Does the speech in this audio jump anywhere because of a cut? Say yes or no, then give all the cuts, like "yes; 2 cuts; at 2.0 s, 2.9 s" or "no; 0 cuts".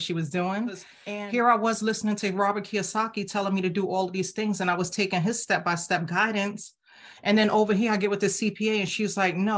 yes; 1 cut; at 0.9 s